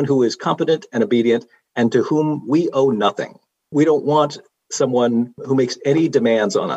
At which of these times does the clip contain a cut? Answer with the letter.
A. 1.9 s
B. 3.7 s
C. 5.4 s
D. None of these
B